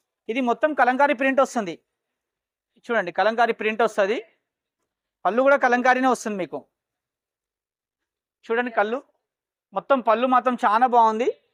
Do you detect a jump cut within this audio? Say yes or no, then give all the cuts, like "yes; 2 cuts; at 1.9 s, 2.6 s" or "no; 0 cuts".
no; 0 cuts